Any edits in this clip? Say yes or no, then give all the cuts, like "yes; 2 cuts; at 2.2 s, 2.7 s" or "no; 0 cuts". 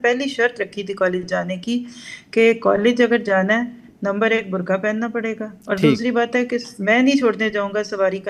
no; 0 cuts